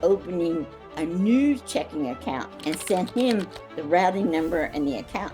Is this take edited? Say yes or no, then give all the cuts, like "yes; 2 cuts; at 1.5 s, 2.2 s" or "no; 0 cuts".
yes; 1 cut; at 2.5 s